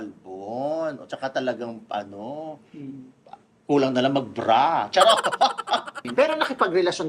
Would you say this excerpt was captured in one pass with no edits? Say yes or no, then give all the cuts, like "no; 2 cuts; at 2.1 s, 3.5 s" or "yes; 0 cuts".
no; 1 cut; at 6.0 s